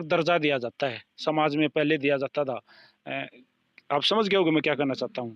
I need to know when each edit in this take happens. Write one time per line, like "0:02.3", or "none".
none